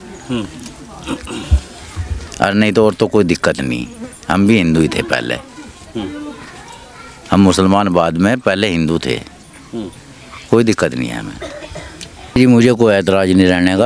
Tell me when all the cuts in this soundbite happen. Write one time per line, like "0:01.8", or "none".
0:12.3